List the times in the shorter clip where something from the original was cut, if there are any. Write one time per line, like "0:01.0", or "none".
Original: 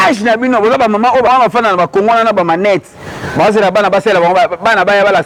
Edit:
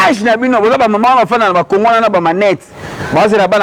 0:01.0